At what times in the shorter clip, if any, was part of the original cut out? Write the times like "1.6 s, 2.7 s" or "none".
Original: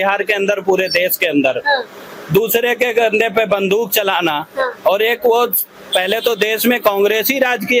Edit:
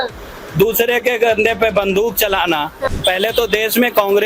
2.8 s